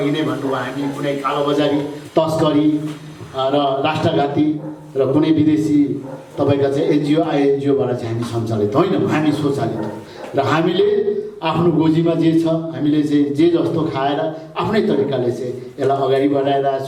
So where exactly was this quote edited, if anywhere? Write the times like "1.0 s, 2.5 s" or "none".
none